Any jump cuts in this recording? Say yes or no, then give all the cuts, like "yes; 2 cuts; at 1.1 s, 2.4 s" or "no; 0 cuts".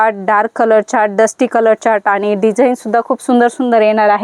no; 0 cuts